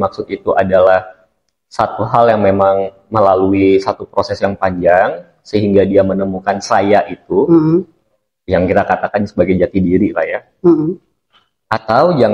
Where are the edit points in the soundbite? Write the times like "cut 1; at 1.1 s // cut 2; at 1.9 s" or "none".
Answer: none